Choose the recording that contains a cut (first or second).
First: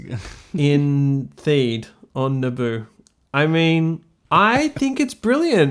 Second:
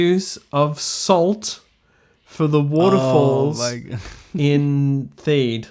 first